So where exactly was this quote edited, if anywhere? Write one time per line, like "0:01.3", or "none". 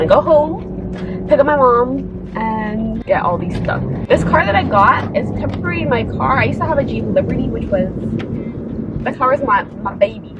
none